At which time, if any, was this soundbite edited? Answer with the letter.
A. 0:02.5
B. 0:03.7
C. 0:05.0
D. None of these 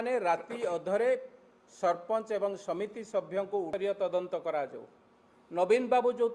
B